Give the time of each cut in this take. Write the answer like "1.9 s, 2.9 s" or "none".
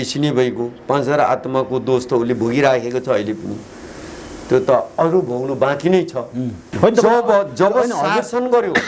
none